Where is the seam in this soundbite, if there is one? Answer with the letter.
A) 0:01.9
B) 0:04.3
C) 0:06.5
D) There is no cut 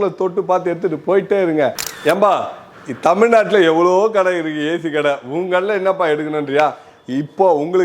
A